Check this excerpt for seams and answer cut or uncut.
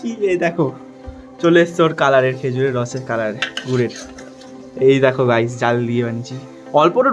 uncut